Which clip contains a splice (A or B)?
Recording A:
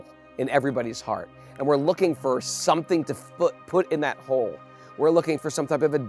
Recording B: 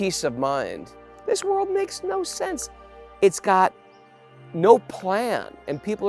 B